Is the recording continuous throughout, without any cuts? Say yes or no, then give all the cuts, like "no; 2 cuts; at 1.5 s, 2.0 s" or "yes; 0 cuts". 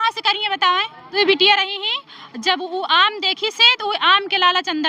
no; 1 cut; at 1.1 s